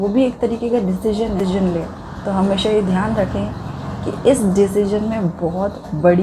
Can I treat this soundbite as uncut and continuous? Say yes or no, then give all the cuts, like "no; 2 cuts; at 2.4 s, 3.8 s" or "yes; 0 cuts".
no; 1 cut; at 1.4 s